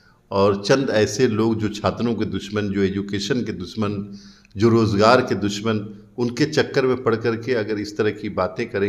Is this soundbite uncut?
yes; 0 cuts

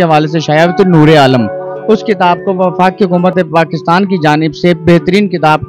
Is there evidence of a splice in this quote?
no; 0 cuts

